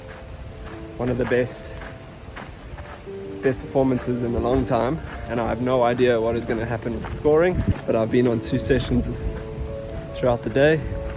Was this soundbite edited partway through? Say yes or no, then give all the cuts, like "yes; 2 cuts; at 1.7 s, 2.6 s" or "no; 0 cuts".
yes; 2 cuts; at 5.1 s, 7.8 s